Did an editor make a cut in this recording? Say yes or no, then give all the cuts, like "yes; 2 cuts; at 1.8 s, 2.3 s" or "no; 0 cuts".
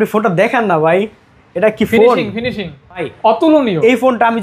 yes; 1 cut; at 3.1 s